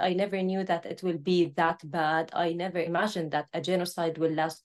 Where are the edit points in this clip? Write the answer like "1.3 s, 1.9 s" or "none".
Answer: 2.9 s